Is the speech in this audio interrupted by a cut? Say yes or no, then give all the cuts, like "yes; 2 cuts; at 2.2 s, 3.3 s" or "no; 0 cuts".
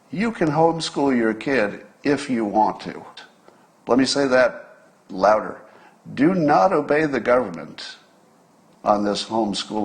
yes; 1 cut; at 3.0 s